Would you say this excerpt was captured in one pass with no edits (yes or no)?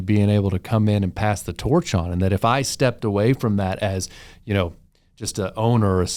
yes